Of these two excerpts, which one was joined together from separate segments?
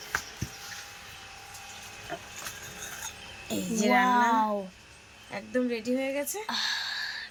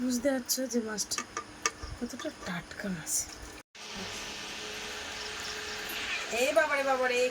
second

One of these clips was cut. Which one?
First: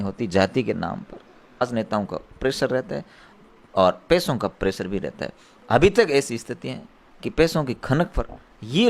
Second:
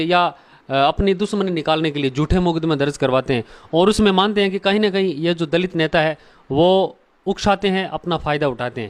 first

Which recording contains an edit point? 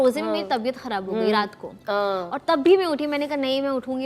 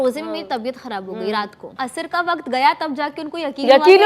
second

